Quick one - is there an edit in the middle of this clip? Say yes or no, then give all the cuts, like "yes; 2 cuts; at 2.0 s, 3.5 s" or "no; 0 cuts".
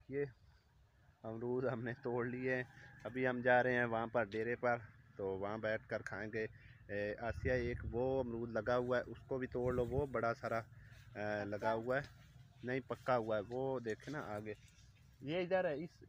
no; 0 cuts